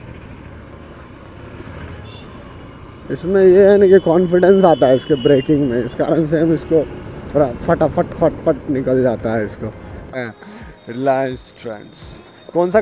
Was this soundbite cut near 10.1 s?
yes; 1 cut; at 10.1 s

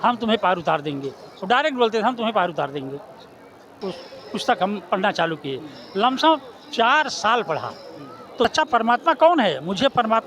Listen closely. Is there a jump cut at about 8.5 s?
yes; 2 cuts; at 3.9 s, 8.5 s

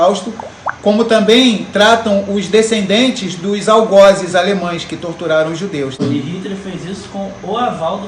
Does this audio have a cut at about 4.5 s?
no; 1 cut; at 6.0 s

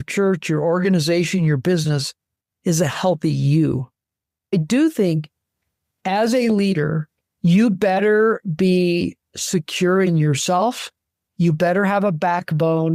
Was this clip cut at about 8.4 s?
no; 1 cut; at 4.5 s

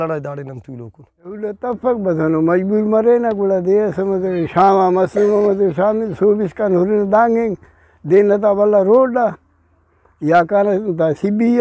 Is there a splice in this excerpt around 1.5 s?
yes; 1 cut; at 1.5 s

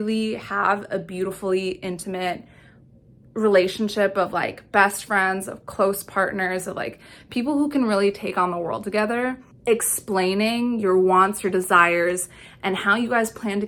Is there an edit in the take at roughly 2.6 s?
no; 0 cuts

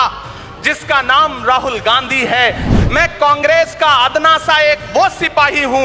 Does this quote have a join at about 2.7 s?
yes; 1 cut; at 2.7 s

